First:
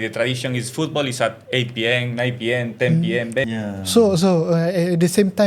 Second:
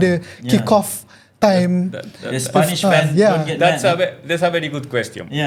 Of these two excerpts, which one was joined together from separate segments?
first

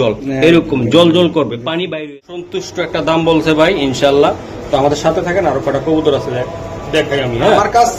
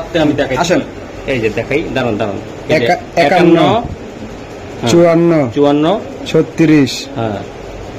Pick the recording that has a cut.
first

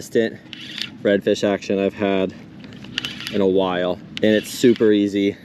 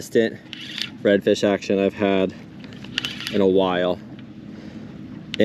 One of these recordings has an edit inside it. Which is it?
first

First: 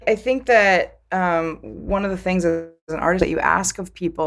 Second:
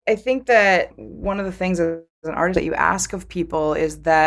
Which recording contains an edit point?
second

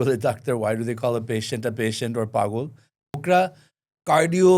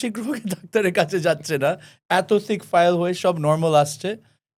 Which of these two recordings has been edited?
first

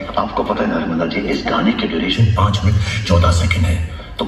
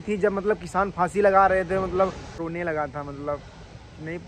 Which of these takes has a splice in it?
second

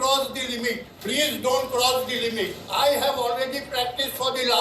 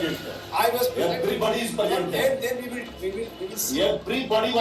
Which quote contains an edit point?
first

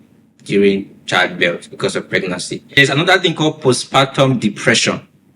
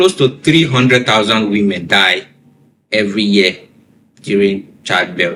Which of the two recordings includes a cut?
first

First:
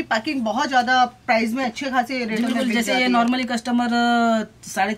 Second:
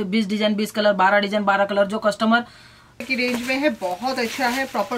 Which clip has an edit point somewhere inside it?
second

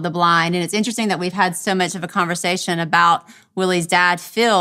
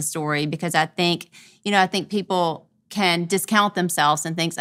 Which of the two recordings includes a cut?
second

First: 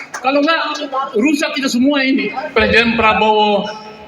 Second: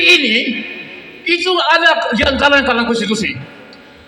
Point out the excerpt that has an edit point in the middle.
first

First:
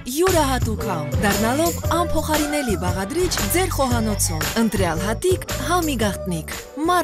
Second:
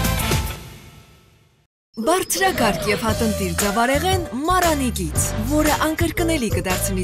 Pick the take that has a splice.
second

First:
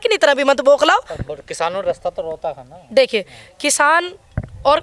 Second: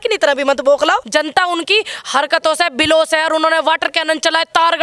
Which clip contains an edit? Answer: second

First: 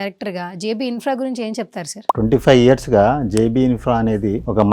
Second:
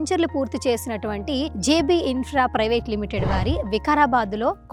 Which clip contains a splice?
first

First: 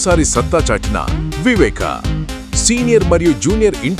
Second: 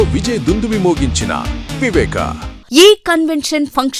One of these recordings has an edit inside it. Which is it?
second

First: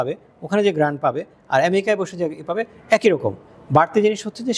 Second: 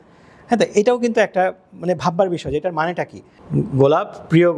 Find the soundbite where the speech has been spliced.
second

